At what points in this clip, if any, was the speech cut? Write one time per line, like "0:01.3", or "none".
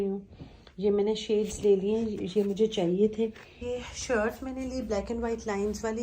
0:03.6